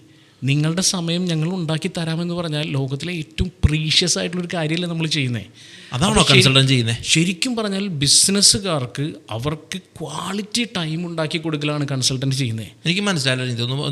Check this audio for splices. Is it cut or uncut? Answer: uncut